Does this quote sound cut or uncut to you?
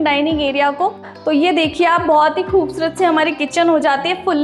cut